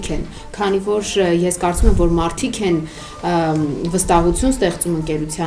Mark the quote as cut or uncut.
uncut